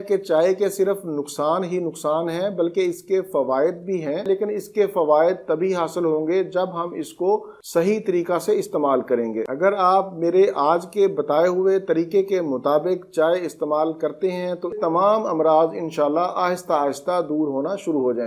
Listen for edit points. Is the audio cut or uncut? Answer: cut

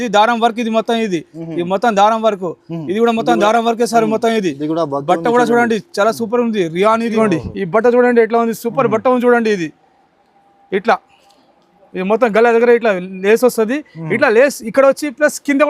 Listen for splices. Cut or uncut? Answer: cut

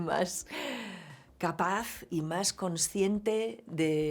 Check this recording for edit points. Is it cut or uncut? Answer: cut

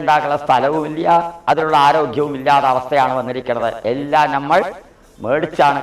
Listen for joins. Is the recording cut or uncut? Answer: uncut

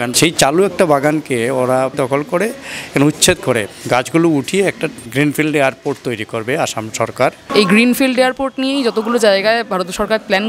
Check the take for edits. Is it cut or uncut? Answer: cut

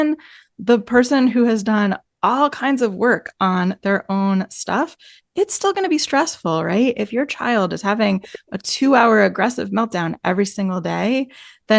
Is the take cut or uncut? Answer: uncut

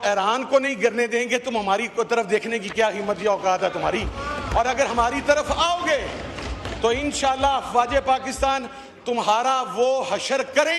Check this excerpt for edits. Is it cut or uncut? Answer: uncut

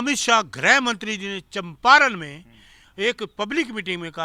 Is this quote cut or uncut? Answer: uncut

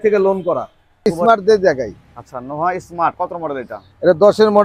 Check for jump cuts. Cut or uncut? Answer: cut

